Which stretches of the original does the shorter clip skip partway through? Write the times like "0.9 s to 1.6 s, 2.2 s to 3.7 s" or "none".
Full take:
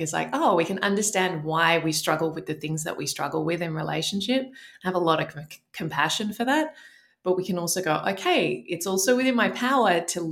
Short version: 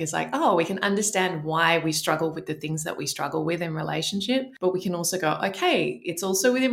4.5 s to 7.2 s